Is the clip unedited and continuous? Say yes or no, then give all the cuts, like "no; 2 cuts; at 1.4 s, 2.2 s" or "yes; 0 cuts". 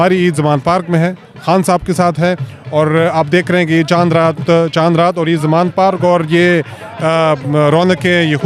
yes; 0 cuts